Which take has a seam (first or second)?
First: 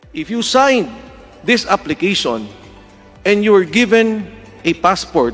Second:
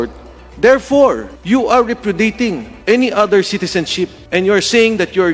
second